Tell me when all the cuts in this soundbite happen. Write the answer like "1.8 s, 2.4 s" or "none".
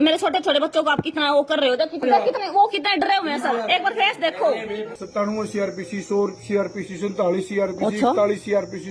2.0 s, 5.0 s